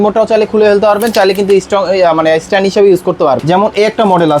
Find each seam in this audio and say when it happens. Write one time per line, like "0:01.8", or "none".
0:03.4